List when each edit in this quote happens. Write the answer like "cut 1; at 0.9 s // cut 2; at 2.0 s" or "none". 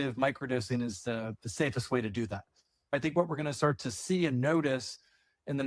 cut 1; at 2.9 s